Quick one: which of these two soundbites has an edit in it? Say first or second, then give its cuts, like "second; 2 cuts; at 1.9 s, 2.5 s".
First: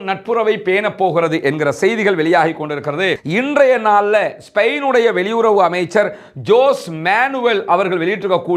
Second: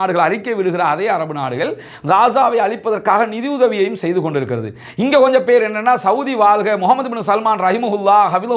first; 1 cut; at 3.2 s